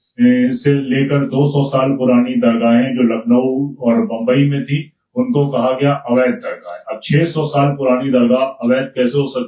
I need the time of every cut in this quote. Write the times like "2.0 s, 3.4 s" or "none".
none